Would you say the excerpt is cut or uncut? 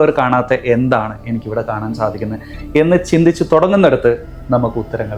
uncut